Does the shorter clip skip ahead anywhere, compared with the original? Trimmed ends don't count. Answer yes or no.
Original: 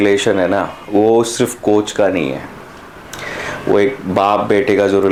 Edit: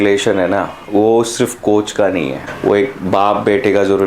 yes